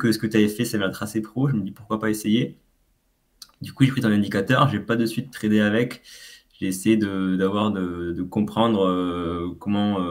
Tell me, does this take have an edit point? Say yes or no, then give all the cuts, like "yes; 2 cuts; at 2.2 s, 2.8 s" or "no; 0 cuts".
no; 0 cuts